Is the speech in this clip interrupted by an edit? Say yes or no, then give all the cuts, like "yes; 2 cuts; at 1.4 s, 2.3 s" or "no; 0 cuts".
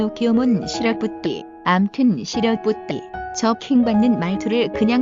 no; 0 cuts